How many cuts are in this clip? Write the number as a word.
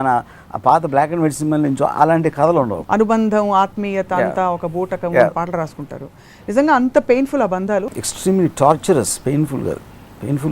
two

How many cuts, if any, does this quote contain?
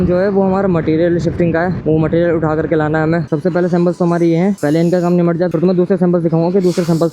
one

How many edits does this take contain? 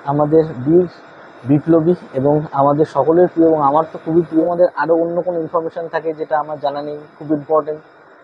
one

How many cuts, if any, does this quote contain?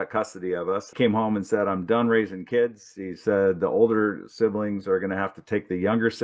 one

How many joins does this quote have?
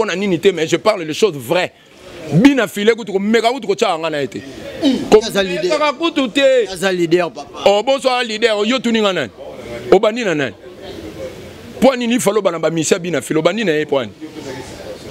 zero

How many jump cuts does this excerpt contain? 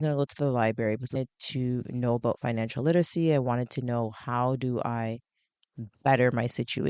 zero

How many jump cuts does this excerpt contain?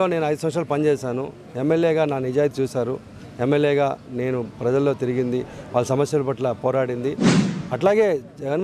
one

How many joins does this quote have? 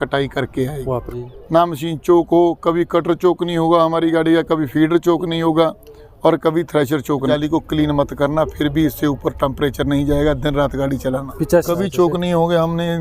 three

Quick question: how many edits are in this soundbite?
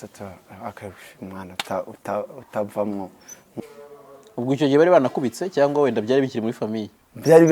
one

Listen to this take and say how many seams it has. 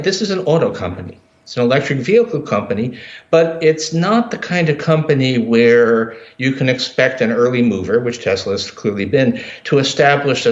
one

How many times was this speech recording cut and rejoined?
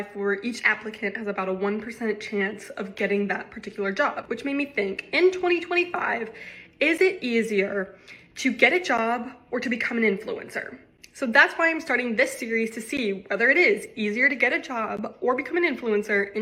zero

